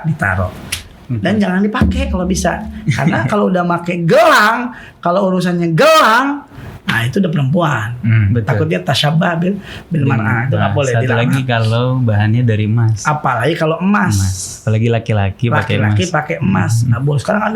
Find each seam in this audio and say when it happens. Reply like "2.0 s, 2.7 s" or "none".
none